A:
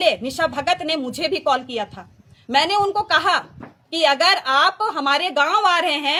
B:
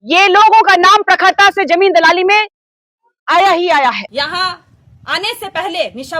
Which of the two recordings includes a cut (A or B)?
B